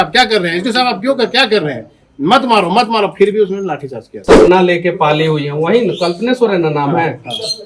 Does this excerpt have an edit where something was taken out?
yes; 1 cut; at 4.4 s

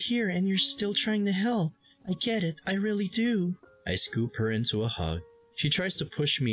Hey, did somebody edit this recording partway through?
yes; 1 cut; at 3.7 s

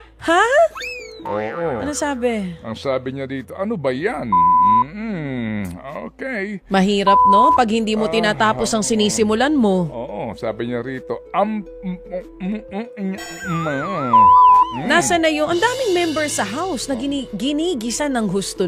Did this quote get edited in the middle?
no; 0 cuts

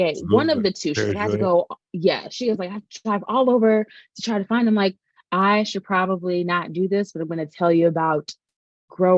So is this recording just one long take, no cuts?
yes; 0 cuts

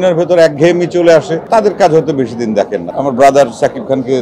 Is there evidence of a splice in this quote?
yes; 2 cuts; at 1.4 s, 2.8 s

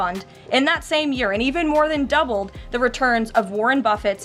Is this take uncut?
yes; 0 cuts

